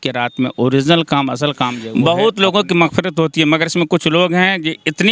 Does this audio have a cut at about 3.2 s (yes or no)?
no